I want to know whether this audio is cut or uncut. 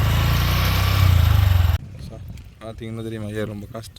cut